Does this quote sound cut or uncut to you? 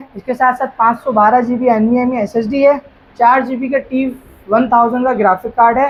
uncut